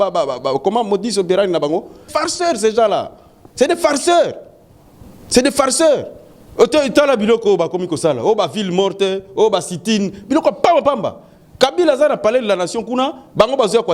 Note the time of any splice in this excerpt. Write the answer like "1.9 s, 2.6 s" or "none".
2.1 s